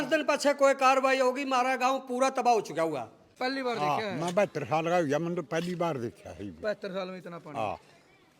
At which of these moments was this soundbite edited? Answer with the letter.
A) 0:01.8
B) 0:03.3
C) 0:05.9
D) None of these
B